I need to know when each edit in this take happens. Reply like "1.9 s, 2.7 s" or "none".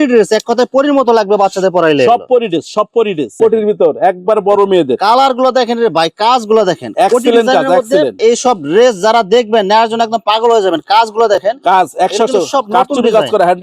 3.4 s, 8.2 s

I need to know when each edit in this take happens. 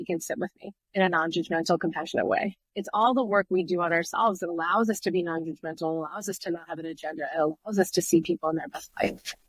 2.7 s

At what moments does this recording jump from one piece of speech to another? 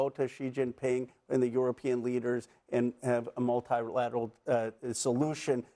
none

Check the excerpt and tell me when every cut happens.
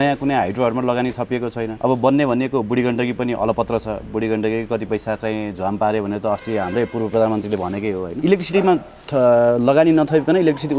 1.7 s, 8.1 s

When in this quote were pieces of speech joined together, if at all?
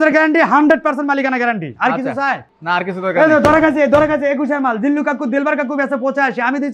none

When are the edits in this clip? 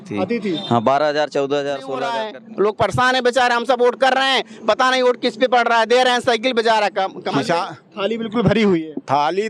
2.3 s, 7.2 s

